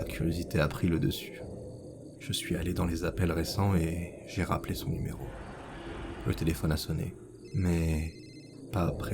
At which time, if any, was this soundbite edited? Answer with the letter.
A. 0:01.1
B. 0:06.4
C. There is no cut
A